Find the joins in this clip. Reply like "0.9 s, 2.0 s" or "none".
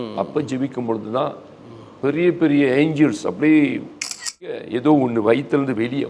4.5 s